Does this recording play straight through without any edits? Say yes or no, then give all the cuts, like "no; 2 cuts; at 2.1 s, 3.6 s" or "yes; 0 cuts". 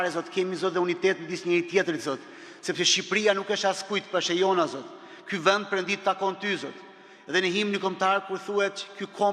yes; 0 cuts